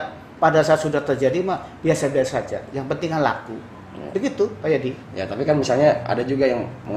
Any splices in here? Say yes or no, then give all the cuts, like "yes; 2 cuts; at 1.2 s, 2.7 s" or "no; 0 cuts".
no; 0 cuts